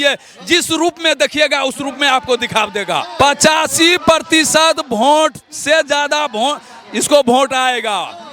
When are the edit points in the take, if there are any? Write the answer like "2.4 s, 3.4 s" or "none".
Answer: 3.1 s